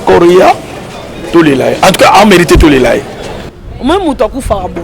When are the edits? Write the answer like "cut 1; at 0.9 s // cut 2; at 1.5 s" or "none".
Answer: cut 1; at 3.4 s